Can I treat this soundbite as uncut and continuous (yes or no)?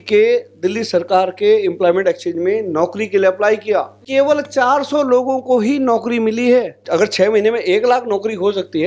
no